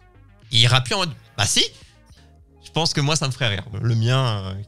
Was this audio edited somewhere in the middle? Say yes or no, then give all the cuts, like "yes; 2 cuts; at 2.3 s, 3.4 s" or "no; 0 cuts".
yes; 2 cuts; at 2.1 s, 3.7 s